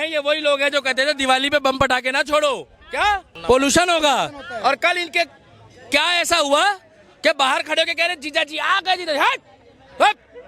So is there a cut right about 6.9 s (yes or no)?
no